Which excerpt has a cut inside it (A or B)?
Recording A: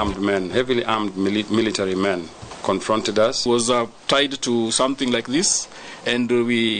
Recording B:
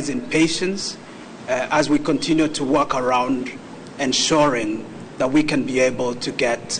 A